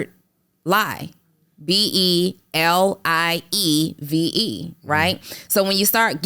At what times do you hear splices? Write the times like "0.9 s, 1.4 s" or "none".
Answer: none